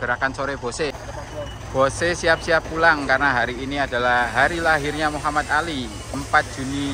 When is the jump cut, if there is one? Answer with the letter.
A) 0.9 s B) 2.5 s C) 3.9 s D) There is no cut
A